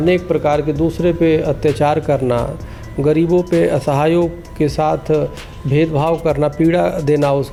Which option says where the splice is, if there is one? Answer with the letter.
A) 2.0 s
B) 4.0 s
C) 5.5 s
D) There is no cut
D